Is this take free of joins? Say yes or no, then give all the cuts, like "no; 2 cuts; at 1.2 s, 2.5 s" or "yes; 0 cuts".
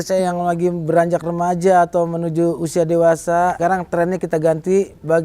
no; 1 cut; at 3.6 s